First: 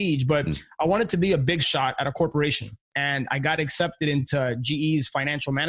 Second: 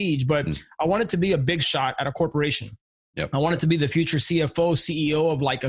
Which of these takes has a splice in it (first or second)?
first